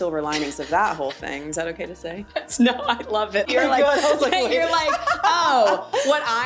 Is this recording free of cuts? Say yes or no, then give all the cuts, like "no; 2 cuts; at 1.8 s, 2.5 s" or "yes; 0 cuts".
no; 1 cut; at 3.5 s